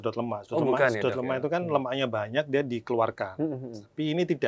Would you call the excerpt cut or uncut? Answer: uncut